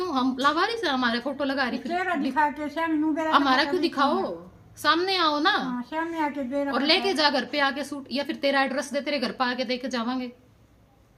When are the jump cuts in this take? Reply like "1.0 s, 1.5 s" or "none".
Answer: none